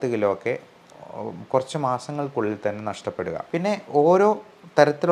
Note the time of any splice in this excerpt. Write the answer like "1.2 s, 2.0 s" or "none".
3.4 s